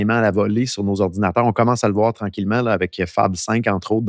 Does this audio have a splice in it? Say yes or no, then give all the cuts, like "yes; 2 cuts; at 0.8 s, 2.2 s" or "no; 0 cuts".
no; 0 cuts